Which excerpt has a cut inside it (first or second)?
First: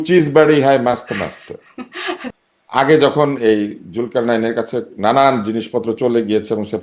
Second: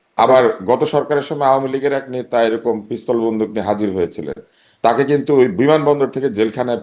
first